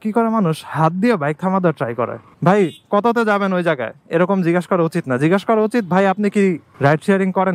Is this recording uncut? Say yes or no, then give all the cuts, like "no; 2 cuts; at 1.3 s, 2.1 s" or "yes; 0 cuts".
no; 1 cut; at 2.2 s